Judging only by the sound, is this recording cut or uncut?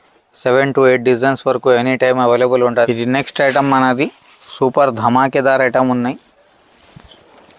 cut